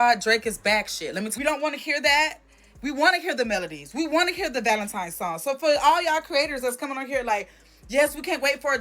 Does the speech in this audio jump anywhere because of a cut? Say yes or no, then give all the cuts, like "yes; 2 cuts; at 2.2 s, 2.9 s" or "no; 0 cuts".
yes; 1 cut; at 1.3 s